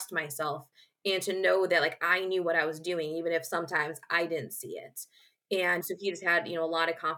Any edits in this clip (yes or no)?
yes